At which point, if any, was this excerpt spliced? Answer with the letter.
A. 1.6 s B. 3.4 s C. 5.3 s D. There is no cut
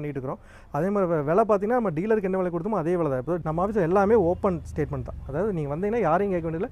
B